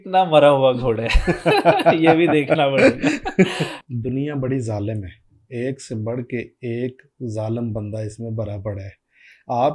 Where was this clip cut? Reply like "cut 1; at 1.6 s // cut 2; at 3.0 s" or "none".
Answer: cut 1; at 3.7 s